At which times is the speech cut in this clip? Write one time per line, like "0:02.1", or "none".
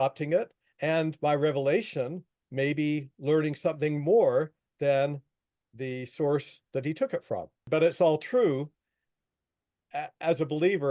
0:07.7